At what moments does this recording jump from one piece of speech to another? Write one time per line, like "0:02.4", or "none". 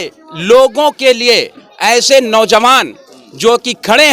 none